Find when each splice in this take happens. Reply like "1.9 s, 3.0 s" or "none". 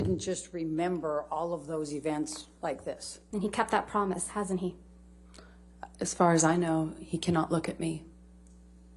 3.1 s

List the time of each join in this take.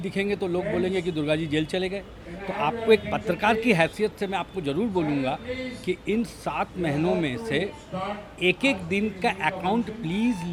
none

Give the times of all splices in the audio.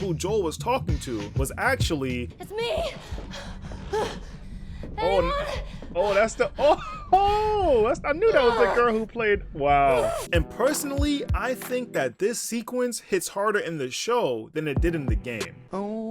2.3 s, 10.2 s

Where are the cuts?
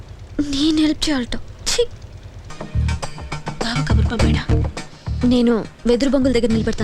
2.5 s

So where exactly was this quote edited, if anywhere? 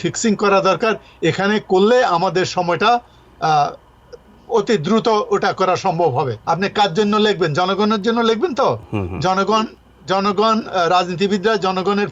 6.4 s

